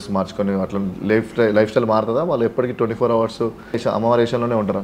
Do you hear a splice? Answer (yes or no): yes